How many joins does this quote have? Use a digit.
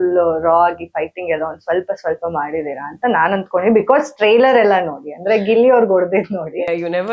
0